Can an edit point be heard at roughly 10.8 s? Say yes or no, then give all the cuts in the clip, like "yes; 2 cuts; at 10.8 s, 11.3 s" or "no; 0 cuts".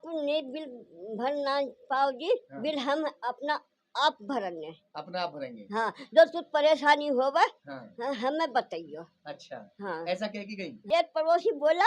yes; 1 cut; at 10.8 s